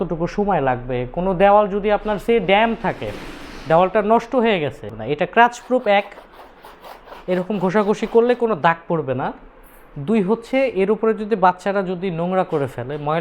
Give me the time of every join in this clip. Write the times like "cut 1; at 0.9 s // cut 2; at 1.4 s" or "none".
cut 1; at 5.0 s